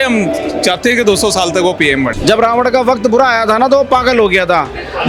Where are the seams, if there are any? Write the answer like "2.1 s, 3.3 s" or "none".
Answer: 2.1 s